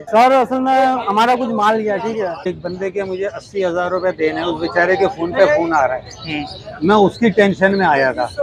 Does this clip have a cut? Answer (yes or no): yes